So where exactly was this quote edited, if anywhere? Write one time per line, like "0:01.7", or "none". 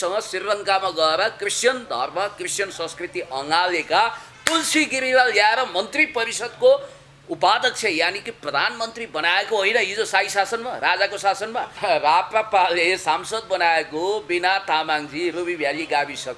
0:11.8